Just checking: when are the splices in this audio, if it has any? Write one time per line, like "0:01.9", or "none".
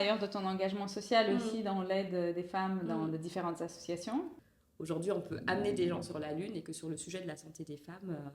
0:04.4